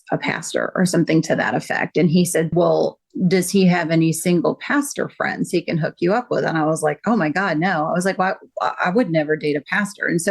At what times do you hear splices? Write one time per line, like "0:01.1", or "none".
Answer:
0:02.5